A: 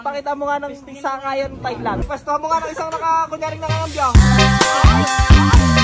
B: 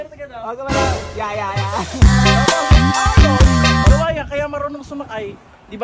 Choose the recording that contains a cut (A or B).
A